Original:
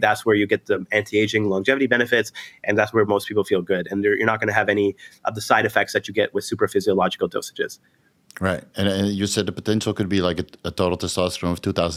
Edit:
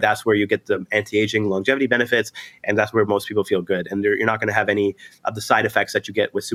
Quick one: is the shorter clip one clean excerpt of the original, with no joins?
yes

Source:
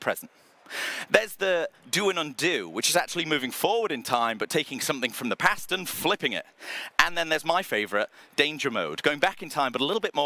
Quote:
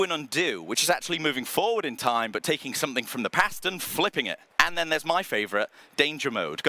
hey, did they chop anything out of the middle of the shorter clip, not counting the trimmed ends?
yes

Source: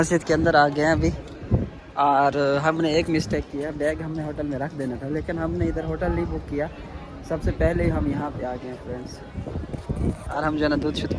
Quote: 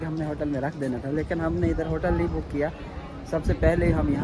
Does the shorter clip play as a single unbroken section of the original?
yes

